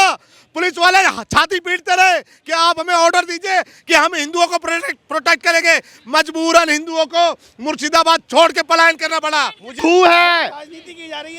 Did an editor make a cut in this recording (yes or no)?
yes